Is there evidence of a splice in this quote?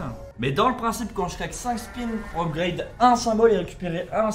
no; 0 cuts

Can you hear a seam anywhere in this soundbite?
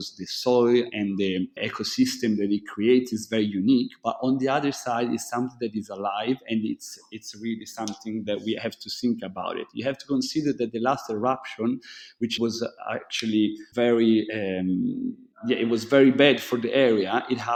no; 0 cuts

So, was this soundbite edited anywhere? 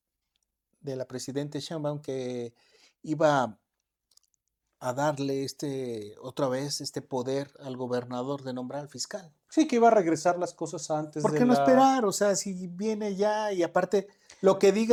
no; 0 cuts

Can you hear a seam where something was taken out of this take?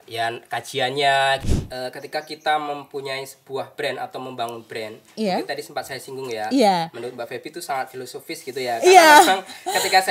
yes; 1 cut; at 1.4 s

